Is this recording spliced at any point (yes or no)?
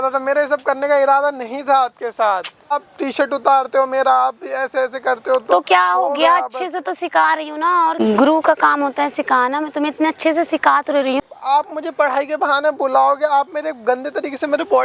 yes